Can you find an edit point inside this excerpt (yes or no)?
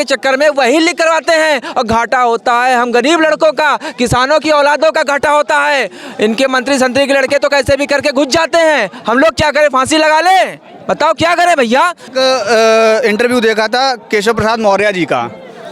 yes